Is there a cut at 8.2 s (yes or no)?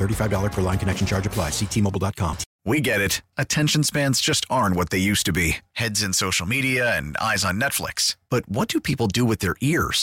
no